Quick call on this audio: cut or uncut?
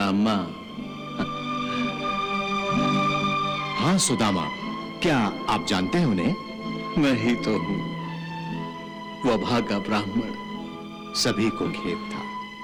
uncut